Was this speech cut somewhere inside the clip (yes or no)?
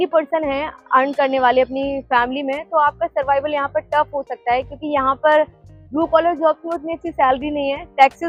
no